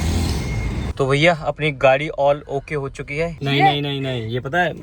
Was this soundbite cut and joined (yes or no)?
yes